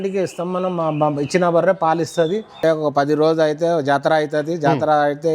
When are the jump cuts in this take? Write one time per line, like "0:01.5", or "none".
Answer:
0:02.6